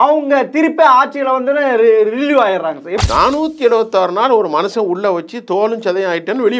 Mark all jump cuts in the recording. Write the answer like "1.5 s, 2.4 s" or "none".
2.9 s